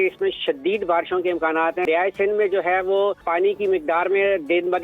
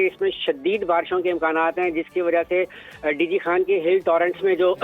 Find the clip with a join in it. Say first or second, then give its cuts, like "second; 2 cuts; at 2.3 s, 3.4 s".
first; 2 cuts; at 1.9 s, 3.2 s